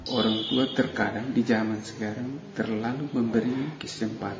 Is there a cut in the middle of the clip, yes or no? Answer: no